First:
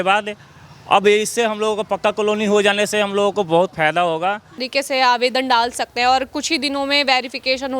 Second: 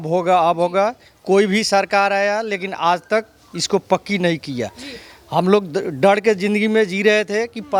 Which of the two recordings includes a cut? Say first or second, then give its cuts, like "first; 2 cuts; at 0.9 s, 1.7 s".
first; 1 cut; at 4.6 s